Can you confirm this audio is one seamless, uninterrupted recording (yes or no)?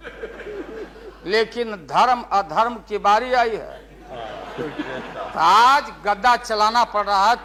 yes